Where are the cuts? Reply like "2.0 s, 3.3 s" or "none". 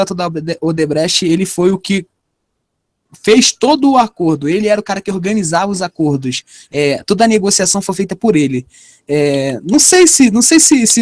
4.8 s